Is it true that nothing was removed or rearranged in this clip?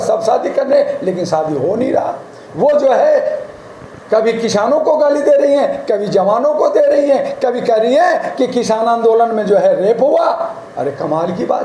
yes; 0 cuts

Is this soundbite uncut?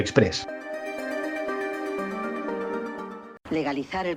no; 1 cut; at 3.3 s

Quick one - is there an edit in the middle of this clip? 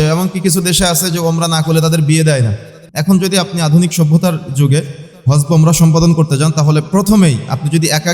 yes; 1 cut; at 2.8 s

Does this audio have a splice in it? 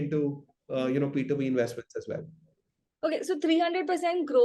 no; 0 cuts

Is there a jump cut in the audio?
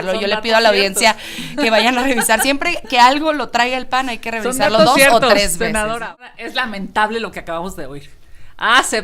yes; 1 cut; at 6.0 s

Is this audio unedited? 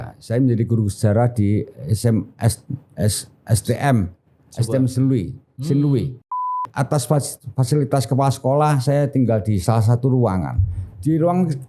no; 1 cut; at 6.3 s

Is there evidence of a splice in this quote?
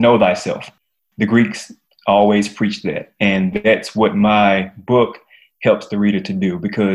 no; 0 cuts

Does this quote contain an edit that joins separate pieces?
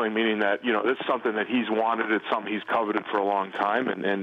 no; 0 cuts

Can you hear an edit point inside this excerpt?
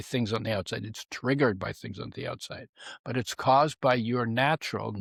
no; 0 cuts

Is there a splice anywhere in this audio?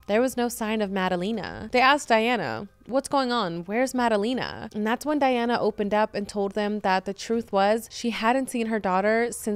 yes; 2 cuts; at 1.5 s, 7.9 s

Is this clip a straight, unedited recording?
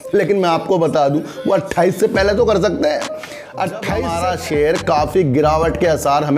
no; 1 cut; at 4.1 s

